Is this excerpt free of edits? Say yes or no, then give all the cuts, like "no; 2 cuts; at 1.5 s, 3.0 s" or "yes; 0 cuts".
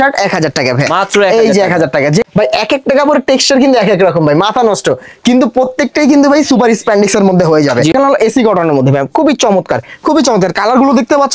no; 2 cuts; at 2.2 s, 7.9 s